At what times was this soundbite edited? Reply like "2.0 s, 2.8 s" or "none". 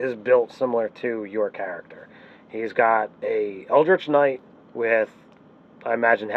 3.6 s